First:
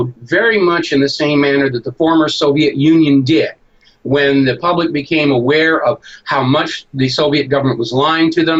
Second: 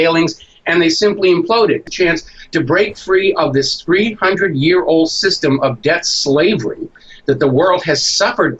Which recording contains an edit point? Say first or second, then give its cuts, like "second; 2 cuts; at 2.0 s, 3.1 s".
second; 1 cut; at 1.8 s